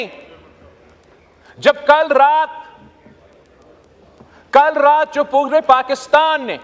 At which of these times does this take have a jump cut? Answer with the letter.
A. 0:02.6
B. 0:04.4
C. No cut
C